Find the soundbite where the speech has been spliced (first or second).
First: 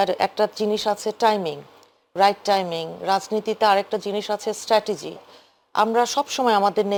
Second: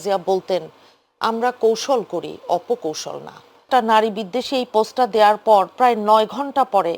second